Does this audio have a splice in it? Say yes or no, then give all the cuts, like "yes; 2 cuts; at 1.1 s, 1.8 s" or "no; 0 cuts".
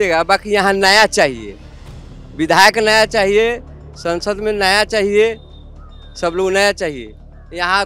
no; 0 cuts